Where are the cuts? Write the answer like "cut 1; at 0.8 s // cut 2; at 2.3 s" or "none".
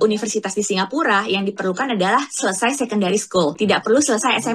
cut 1; at 3.5 s